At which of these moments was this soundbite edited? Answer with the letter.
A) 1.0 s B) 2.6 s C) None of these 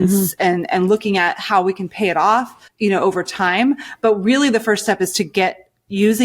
B